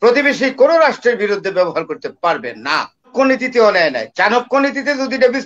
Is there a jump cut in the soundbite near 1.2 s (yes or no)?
no